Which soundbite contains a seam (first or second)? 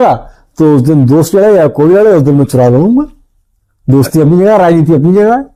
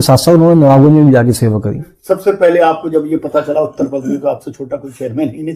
second